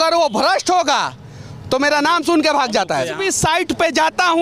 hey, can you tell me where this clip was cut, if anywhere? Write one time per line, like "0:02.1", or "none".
0:03.2